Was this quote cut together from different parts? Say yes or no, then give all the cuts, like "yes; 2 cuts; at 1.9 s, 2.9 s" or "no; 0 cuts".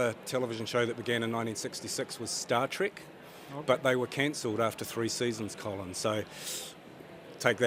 no; 0 cuts